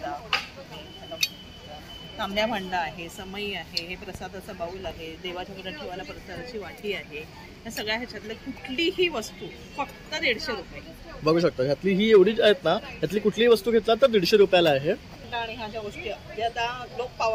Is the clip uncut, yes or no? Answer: no